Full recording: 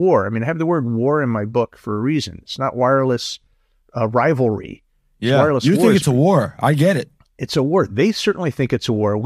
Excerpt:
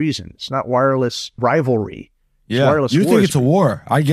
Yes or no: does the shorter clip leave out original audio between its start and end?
yes